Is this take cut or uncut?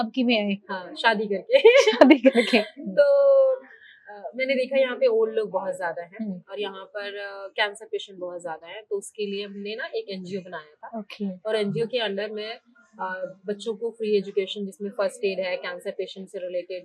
uncut